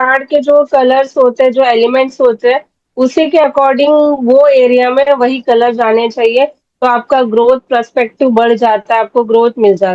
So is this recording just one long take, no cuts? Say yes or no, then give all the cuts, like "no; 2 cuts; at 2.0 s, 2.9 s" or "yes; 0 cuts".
yes; 0 cuts